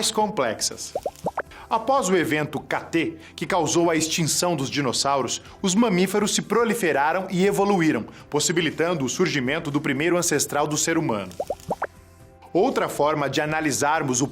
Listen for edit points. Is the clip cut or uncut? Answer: cut